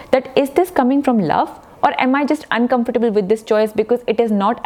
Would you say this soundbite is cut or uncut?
uncut